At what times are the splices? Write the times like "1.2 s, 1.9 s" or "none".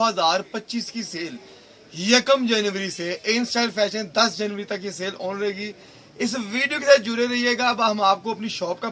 none